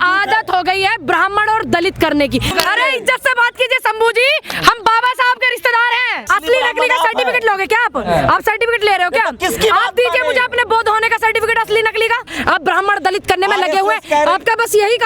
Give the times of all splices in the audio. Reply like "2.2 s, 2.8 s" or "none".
2.5 s, 6.3 s, 12.3 s